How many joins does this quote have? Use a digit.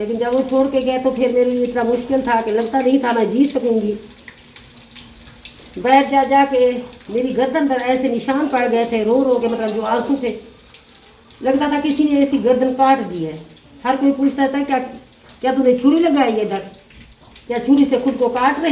0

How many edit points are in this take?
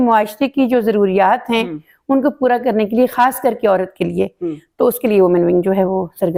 0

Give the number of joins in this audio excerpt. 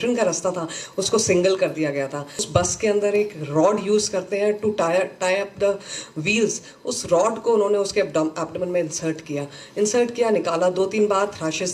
1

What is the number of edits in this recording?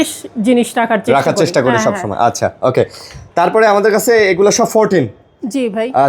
0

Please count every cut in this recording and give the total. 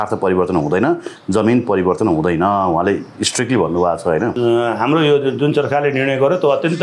1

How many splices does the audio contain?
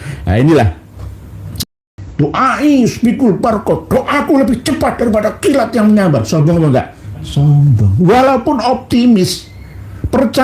1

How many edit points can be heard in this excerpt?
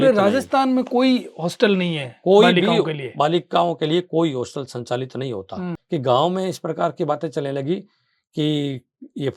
1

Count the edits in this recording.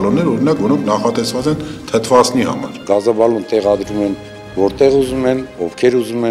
1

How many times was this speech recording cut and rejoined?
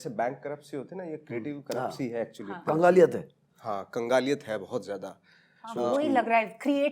0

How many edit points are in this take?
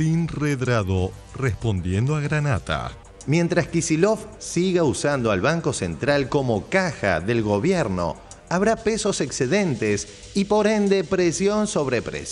0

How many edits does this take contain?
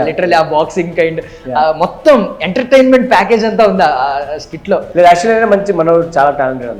1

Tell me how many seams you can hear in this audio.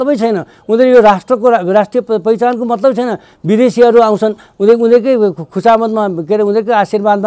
0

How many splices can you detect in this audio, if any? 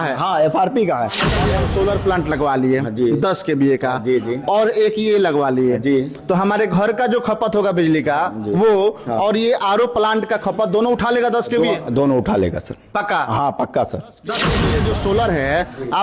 2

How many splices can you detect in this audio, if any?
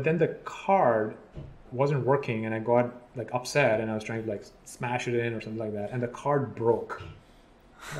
1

